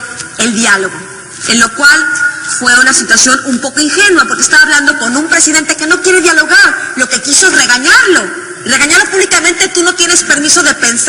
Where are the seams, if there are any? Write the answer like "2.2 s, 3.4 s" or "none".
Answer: 8.0 s